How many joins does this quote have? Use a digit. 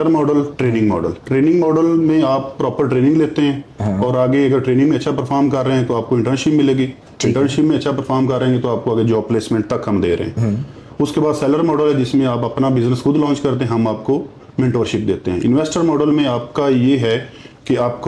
0